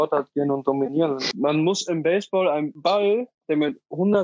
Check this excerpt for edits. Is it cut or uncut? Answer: cut